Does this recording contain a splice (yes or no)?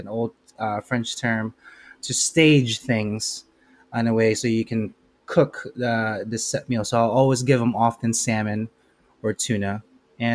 no